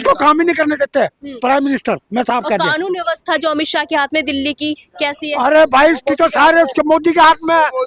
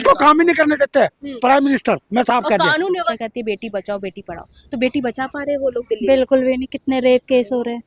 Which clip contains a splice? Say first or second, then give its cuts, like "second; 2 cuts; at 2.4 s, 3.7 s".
second; 1 cut; at 3.1 s